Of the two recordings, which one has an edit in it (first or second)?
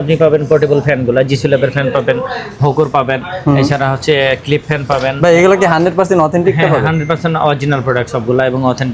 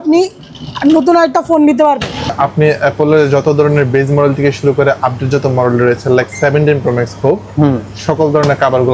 second